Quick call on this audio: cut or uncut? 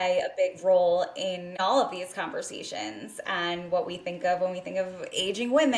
cut